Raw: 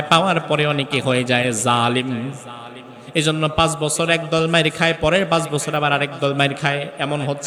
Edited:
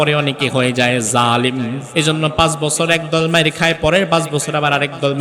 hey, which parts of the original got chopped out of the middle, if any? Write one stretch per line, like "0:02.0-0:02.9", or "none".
0:02.3-0:03.0